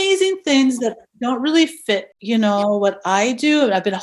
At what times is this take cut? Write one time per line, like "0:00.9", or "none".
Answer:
0:02.1

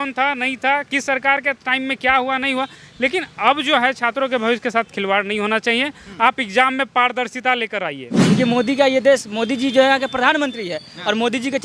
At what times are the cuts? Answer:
0:08.2

